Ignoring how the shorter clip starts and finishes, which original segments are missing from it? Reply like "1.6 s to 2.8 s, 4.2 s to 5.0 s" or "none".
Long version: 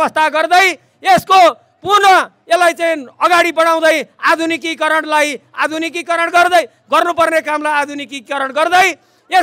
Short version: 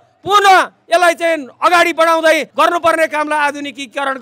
4.1 s to 6.8 s